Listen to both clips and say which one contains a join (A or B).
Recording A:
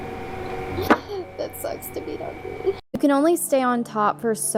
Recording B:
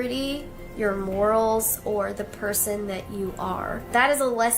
A